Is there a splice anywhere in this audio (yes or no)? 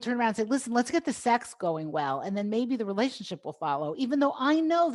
no